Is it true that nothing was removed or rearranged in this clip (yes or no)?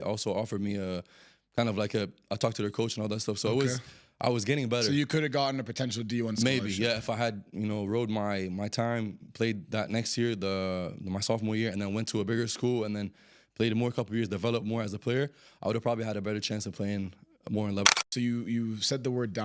no